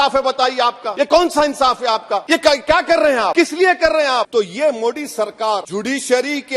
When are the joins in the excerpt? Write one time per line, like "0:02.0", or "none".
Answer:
0:00.8
0:02.2
0:03.3
0:04.3
0:05.7